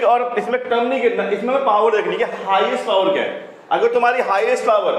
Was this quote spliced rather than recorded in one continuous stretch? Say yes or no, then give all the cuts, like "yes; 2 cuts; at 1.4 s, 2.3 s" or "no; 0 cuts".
no; 0 cuts